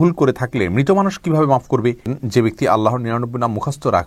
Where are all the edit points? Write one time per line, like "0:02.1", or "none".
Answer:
0:02.2

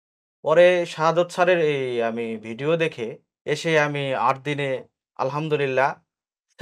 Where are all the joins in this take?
0:03.3

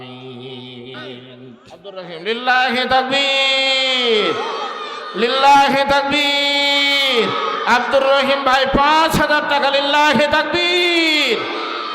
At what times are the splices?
0:01.6

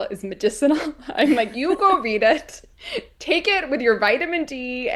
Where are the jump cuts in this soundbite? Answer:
none

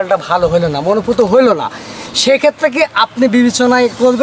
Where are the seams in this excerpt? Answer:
none

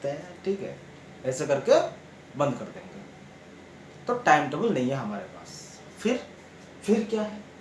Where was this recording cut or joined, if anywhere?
none

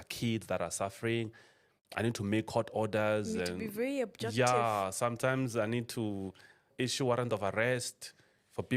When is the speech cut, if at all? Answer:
0:06.7

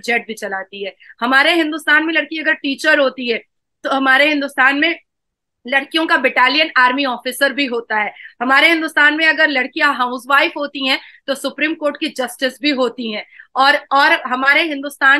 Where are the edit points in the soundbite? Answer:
none

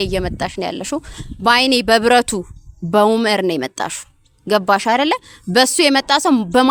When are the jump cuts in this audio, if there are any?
none

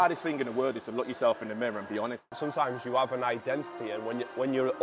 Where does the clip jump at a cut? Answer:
0:02.3

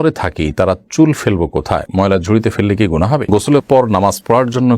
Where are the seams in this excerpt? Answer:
0:03.3

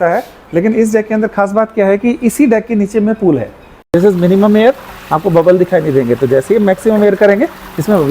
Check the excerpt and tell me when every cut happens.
0:03.9

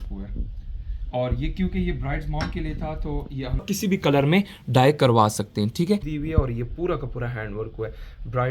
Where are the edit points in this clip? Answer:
0:03.6
0:06.1

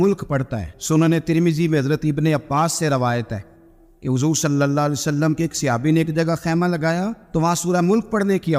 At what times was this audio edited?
none

